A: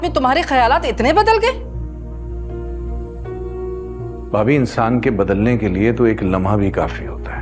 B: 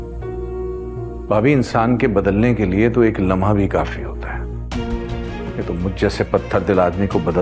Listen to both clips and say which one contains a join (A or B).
B